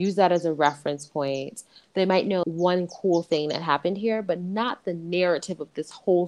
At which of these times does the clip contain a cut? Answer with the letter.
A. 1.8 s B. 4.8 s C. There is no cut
A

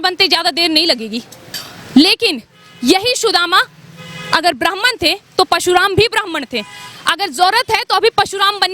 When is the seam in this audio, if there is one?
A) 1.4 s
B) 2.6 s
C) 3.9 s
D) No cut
A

